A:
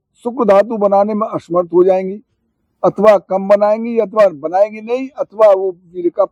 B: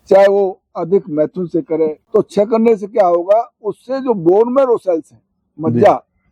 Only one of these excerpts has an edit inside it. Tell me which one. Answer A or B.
B